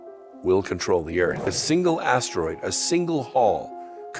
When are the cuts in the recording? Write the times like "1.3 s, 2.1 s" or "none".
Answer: 1.6 s